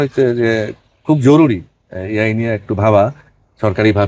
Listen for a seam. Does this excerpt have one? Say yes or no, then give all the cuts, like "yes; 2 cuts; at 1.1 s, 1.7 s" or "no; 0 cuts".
no; 0 cuts